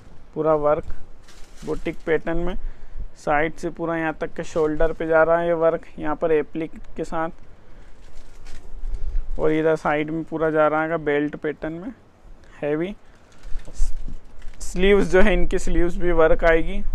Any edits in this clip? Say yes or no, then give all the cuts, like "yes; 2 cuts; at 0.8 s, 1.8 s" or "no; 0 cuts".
no; 0 cuts